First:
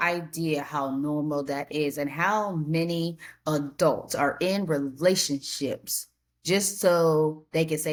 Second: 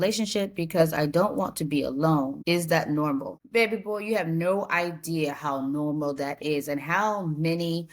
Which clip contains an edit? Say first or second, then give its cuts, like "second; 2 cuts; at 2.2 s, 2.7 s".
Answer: second; 2 cuts; at 2.4 s, 3.4 s